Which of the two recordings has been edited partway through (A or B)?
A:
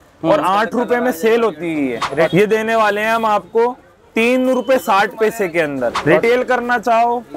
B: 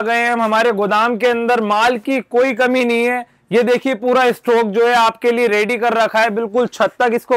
A